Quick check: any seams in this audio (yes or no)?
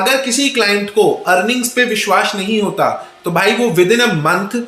no